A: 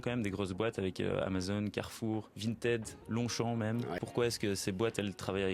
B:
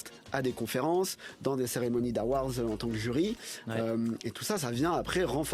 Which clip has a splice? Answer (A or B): A